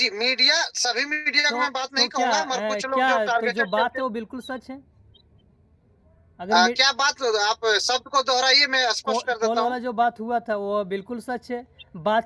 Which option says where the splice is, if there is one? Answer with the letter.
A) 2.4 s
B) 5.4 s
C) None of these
C